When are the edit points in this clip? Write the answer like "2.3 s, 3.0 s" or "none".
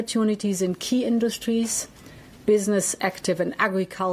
none